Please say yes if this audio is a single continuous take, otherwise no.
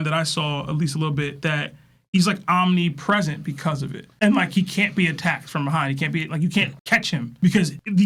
yes